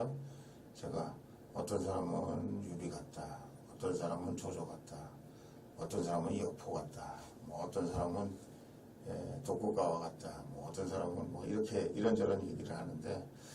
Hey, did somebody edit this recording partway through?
no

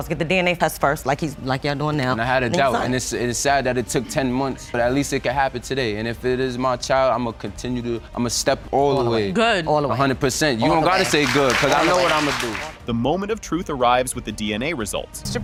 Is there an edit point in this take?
no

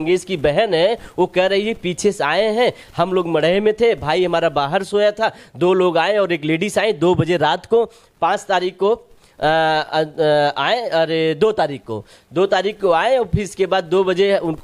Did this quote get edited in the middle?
no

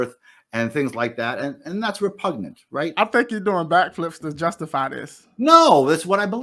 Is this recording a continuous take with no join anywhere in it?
no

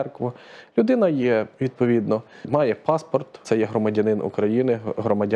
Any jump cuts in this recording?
yes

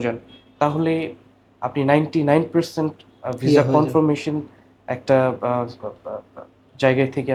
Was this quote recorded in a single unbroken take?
yes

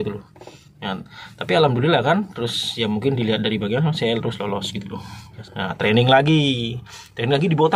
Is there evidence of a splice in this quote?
yes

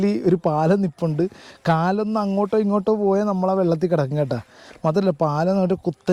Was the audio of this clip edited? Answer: no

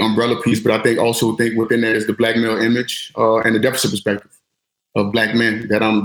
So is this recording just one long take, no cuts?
yes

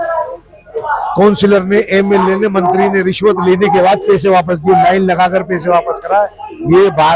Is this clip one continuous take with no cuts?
yes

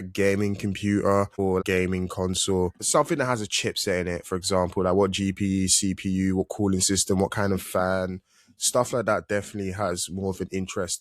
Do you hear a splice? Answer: yes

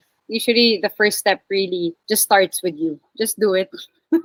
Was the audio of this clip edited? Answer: no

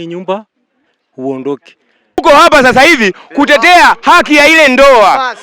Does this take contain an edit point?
yes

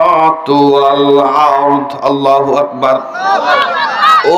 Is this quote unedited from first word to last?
yes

